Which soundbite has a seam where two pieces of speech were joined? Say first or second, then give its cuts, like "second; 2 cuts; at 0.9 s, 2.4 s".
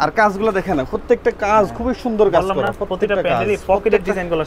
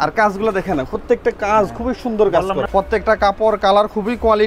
second; 1 cut; at 2.7 s